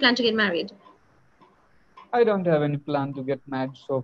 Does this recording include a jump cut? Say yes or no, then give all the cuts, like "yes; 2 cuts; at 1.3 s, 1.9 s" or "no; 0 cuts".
no; 0 cuts